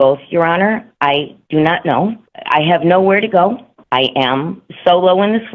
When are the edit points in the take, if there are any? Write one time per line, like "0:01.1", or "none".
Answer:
0:02.3
0:03.7